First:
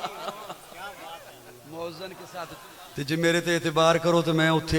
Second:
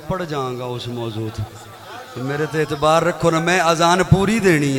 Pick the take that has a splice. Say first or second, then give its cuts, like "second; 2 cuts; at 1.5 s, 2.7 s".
first; 1 cut; at 2.5 s